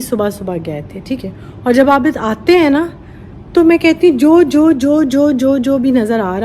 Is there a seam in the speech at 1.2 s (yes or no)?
yes